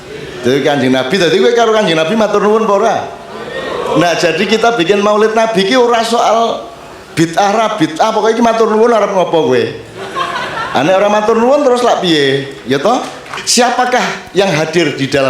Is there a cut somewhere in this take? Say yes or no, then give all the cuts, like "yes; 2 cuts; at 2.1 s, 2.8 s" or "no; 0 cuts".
yes; 1 cut; at 13.4 s